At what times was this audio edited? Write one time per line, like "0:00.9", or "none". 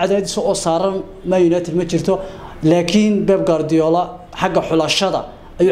none